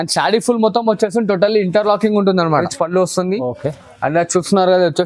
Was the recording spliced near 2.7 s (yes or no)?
yes